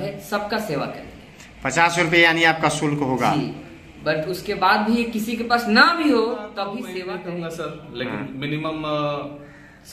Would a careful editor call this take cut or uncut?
cut